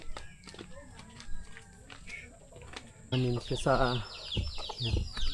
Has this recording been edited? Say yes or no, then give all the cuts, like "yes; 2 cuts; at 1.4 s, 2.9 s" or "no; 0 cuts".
yes; 1 cut; at 3.1 s